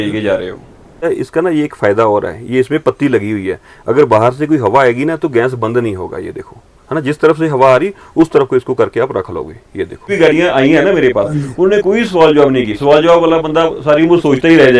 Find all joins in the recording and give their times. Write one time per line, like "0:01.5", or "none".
0:01.1
0:10.1